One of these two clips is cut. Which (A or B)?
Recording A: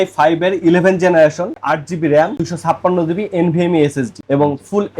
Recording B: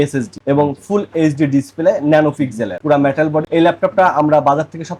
A